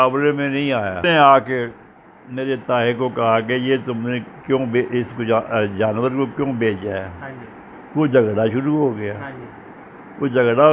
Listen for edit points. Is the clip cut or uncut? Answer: cut